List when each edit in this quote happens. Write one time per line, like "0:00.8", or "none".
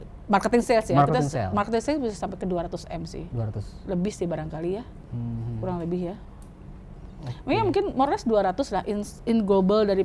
none